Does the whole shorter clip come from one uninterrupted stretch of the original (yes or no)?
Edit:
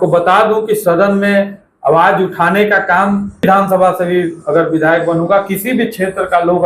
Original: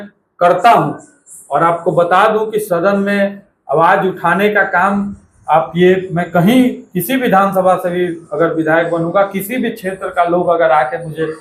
no